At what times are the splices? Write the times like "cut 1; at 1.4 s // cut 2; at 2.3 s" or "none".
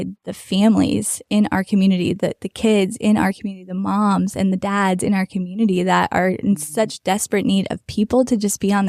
none